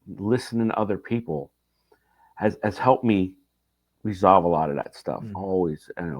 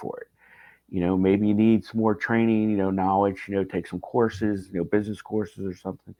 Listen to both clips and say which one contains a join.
first; 1 cut; at 5.3 s

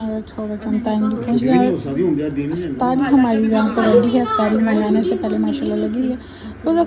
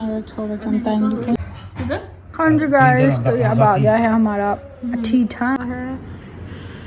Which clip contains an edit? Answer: second; 2 cuts; at 1.4 s, 5.6 s

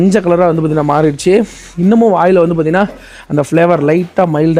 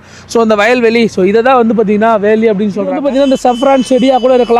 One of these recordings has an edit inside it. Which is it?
second; 1 cut; at 3.0 s

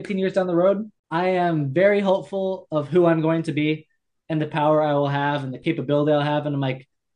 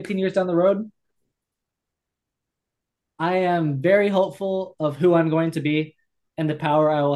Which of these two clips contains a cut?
first; 1 cut; at 0.9 s

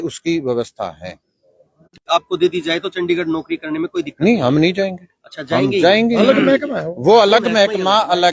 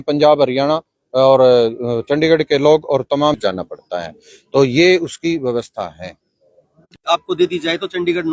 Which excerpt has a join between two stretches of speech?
second; 1 cut; at 3.4 s

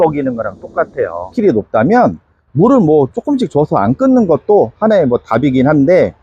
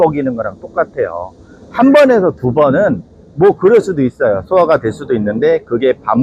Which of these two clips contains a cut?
first; 1 cut; at 1.3 s

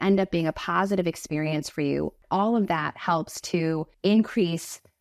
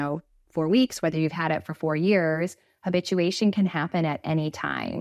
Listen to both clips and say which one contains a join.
first; 2 cuts; at 2.2 s, 3.9 s

